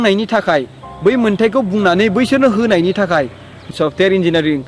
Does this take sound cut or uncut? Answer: cut